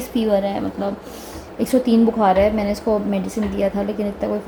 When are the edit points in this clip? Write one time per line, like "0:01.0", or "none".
none